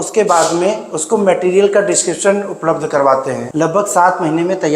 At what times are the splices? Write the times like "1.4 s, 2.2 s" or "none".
3.4 s